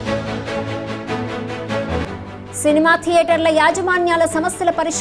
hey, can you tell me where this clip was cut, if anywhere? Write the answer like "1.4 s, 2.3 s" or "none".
1.4 s